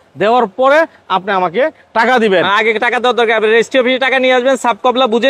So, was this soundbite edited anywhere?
no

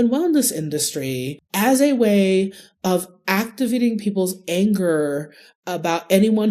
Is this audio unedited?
no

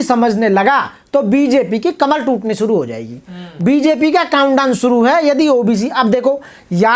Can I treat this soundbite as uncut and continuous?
yes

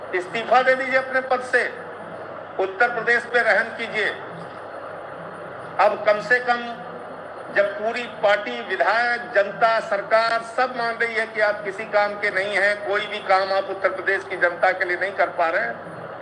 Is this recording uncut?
yes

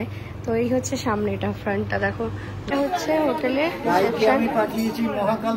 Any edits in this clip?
yes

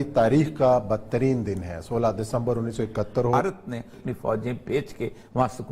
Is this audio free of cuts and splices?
no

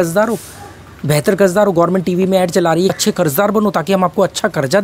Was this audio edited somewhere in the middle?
yes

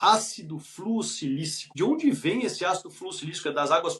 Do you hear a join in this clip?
yes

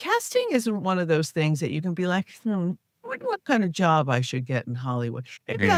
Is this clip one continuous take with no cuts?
yes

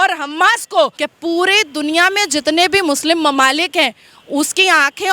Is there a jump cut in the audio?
yes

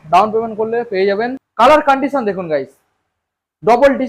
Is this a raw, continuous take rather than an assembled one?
no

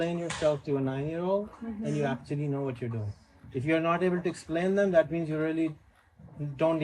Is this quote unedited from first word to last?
yes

